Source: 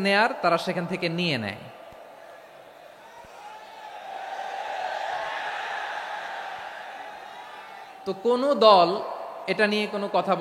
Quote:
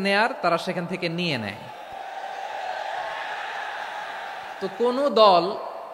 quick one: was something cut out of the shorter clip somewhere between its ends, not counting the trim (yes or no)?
yes